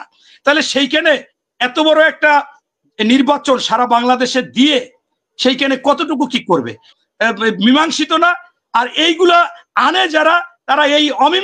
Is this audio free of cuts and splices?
no; 1 cut; at 7.0 s

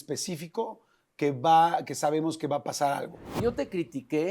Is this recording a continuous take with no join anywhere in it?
no; 1 cut; at 3.4 s

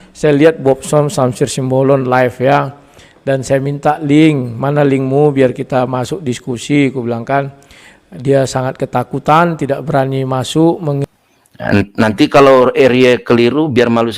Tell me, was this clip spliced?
yes; 1 cut; at 11.1 s

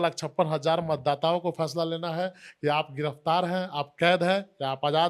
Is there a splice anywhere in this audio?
no; 0 cuts

